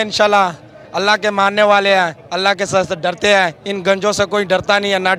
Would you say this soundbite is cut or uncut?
uncut